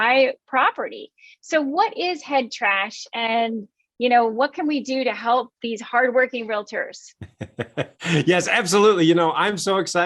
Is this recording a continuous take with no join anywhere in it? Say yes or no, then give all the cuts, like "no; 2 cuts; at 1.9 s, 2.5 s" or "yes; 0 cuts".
yes; 0 cuts